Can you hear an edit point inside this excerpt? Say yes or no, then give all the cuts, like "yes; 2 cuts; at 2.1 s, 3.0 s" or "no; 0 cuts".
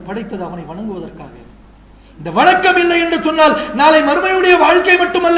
no; 0 cuts